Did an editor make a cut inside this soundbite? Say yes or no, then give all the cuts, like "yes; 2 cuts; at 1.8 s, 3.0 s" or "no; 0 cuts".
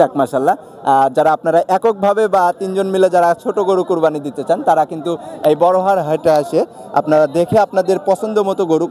no; 0 cuts